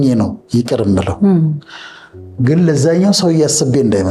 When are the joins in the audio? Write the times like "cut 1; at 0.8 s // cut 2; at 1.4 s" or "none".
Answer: none

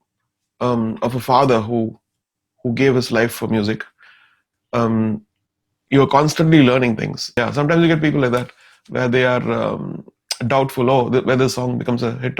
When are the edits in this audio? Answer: cut 1; at 7.4 s

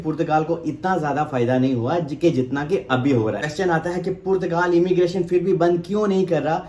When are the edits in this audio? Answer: cut 1; at 3.5 s

